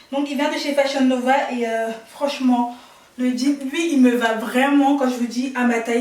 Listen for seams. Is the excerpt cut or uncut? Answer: uncut